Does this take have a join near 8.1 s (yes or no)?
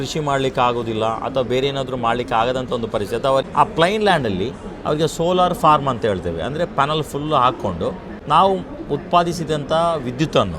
yes